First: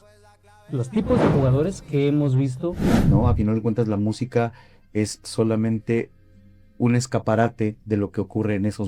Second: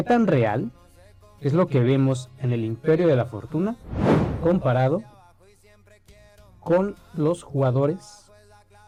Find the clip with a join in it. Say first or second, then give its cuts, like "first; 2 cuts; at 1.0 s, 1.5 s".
first; 1 cut; at 2.9 s